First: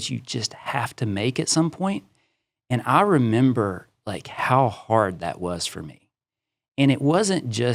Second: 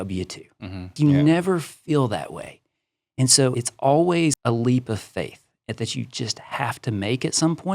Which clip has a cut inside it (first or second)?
second